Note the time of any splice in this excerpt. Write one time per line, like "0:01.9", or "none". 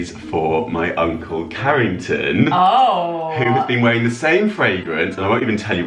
none